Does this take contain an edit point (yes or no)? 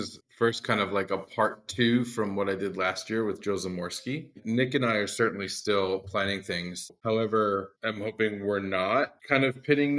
yes